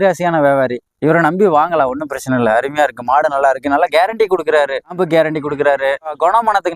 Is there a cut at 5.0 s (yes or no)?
yes